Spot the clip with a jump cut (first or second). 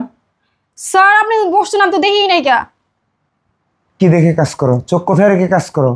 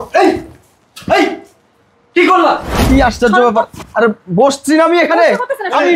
second